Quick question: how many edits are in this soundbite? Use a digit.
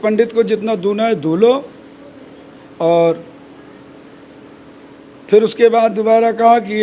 0